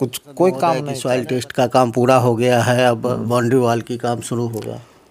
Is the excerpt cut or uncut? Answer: cut